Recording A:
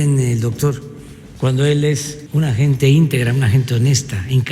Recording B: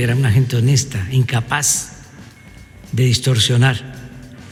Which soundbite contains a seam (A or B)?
A